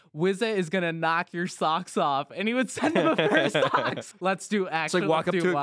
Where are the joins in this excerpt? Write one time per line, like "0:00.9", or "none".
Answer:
0:04.0